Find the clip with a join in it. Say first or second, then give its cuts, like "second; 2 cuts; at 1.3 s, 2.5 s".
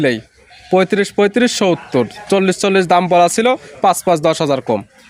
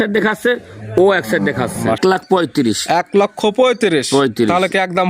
second; 1 cut; at 2.0 s